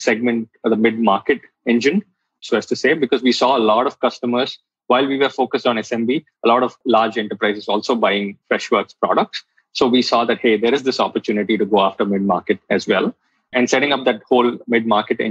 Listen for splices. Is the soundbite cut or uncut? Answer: cut